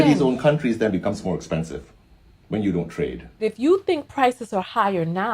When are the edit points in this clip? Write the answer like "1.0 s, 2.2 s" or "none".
3.4 s